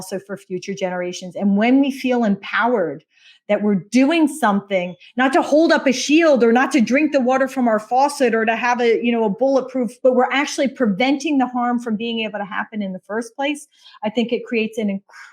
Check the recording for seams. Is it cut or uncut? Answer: cut